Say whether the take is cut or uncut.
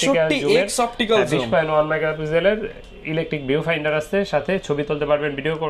uncut